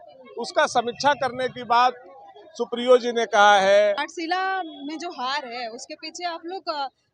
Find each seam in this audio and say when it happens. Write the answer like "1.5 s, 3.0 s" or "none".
4.0 s